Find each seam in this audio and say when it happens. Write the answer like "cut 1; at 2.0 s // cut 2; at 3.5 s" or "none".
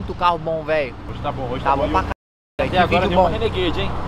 cut 1; at 1.0 s